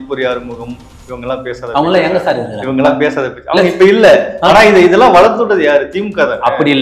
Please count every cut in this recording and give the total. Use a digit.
0